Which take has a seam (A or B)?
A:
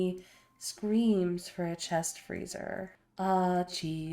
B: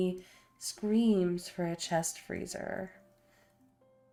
A